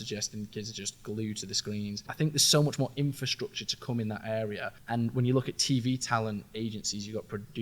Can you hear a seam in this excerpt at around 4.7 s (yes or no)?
yes